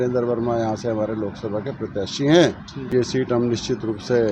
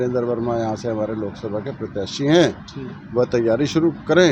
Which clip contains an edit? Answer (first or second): first